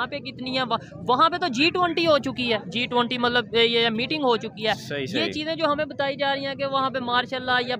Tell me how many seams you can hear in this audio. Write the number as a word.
zero